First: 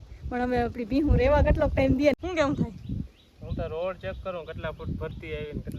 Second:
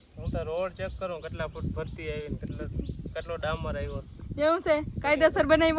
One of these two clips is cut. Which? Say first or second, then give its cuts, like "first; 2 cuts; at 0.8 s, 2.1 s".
first; 1 cut; at 2.2 s